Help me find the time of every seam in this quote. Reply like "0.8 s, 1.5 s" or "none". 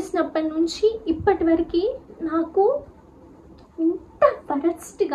none

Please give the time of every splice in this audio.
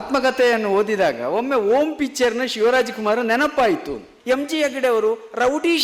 4.1 s

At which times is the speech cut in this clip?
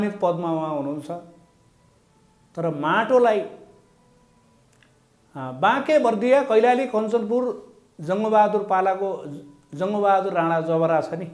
none

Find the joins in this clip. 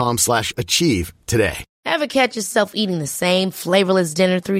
1.7 s

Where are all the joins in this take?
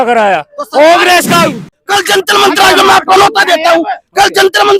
1.7 s

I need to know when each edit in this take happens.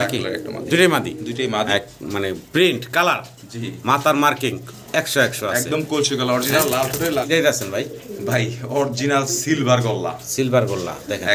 1.7 s, 7.3 s

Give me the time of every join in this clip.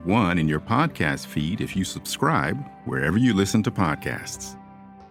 none

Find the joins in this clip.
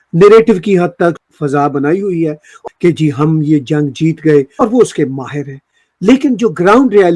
1.2 s, 2.5 s, 4.5 s

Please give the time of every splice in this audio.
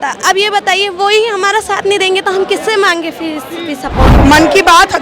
4.1 s

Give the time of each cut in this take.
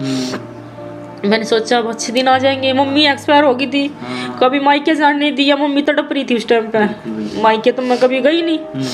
none

